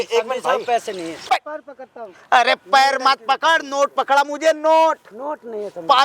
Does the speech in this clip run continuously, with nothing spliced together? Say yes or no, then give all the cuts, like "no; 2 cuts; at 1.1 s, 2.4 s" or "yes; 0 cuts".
no; 1 cut; at 1.1 s